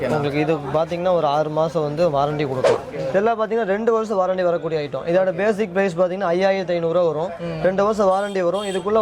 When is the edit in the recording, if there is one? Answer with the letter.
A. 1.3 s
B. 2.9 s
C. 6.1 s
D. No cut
B